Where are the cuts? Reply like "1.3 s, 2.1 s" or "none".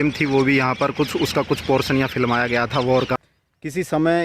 3.2 s